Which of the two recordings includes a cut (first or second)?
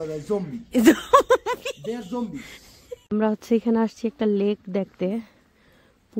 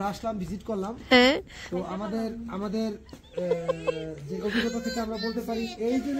first